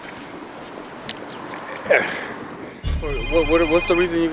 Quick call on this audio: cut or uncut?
cut